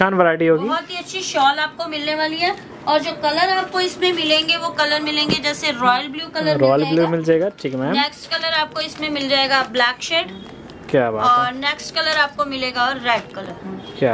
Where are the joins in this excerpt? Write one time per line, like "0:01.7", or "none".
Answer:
none